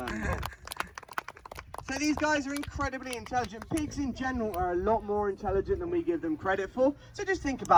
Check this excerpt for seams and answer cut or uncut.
uncut